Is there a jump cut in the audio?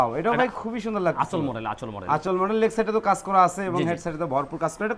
no; 0 cuts

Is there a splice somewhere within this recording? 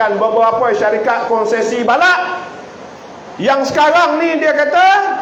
no; 0 cuts

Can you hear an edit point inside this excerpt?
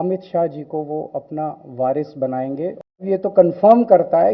yes; 1 cut; at 2.9 s

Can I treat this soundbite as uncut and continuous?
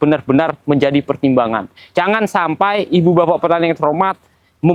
yes; 0 cuts

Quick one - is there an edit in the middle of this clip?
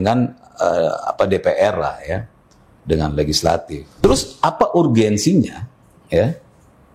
yes; 1 cut; at 3.8 s

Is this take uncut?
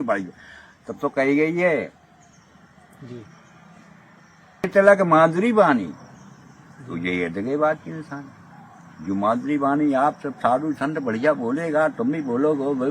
no; 1 cut; at 4.7 s

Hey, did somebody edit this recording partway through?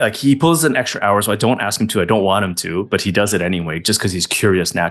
no; 0 cuts

